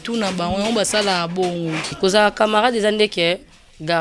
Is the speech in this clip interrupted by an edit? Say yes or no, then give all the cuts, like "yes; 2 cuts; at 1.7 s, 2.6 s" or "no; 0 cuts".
yes; 1 cut; at 1.9 s